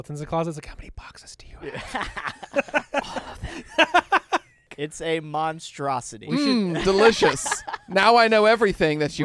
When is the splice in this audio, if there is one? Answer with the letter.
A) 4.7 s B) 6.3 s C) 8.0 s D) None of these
A